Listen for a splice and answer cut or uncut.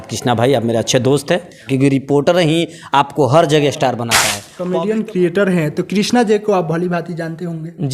cut